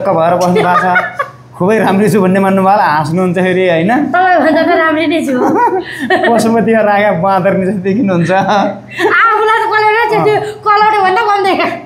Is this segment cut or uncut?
uncut